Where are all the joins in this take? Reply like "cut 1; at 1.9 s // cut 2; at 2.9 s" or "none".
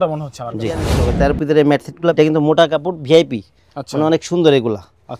cut 1; at 1.0 s // cut 2; at 2.1 s